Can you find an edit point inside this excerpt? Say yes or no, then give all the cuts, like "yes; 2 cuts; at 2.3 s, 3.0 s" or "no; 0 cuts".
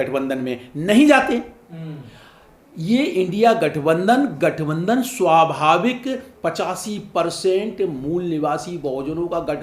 no; 0 cuts